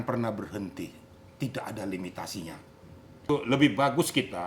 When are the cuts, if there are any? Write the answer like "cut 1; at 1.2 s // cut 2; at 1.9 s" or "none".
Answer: cut 1; at 3.3 s